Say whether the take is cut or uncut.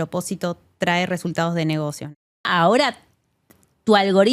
cut